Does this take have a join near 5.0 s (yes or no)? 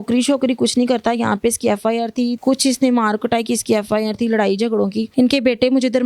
yes